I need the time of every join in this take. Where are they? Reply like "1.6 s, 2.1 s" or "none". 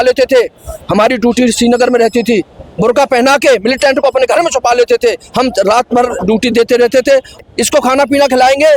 7.4 s